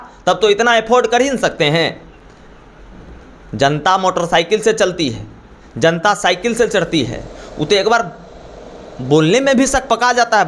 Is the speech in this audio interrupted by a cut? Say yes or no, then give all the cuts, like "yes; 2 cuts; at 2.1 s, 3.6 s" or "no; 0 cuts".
no; 0 cuts